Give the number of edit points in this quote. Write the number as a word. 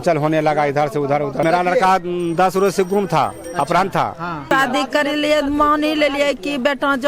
two